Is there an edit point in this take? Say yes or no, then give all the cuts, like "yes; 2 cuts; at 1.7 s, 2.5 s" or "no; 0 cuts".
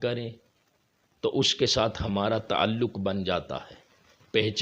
no; 0 cuts